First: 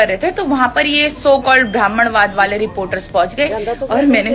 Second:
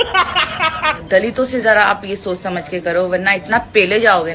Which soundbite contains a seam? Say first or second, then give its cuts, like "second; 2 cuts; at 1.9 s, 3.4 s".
second; 1 cut; at 1.0 s